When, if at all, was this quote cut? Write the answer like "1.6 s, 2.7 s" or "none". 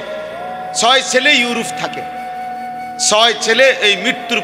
1.7 s, 3.1 s

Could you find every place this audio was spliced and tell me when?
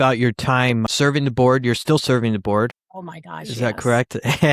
0.9 s

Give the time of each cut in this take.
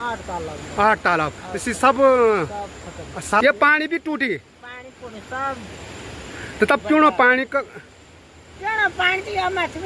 3.4 s

